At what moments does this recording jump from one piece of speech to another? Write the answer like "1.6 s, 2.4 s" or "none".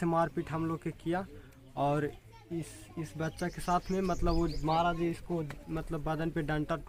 none